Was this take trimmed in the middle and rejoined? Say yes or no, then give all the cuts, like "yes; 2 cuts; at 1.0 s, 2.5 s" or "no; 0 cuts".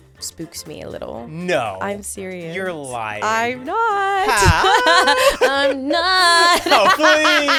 no; 0 cuts